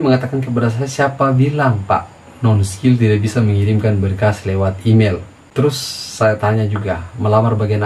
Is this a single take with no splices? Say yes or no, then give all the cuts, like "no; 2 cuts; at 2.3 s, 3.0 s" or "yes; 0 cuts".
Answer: no; 1 cut; at 5.4 s